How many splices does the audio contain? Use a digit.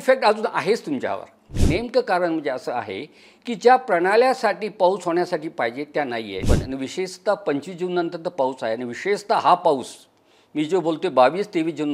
2